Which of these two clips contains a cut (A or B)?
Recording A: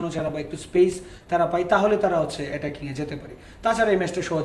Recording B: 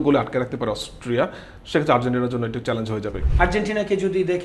B